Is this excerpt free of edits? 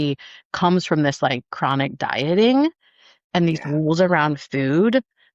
yes; 0 cuts

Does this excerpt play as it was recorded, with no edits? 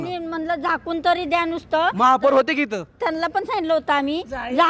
no; 1 cut; at 3.0 s

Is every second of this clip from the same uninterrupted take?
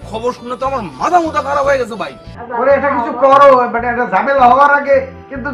no; 1 cut; at 2.3 s

